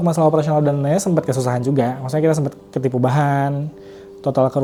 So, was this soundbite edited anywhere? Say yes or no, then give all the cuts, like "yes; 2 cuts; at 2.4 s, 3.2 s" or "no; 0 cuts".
no; 0 cuts